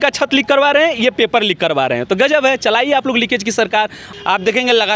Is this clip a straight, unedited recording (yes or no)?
no